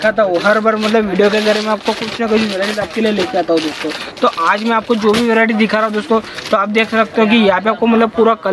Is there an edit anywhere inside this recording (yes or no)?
no